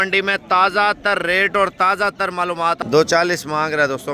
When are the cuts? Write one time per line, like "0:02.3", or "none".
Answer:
0:02.8